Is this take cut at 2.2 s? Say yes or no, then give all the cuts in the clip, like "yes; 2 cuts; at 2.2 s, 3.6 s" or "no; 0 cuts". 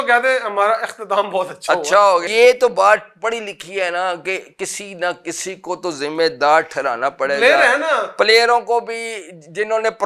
yes; 1 cut; at 2.2 s